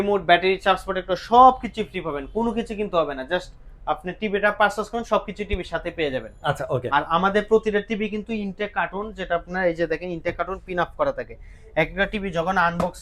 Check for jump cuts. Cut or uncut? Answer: uncut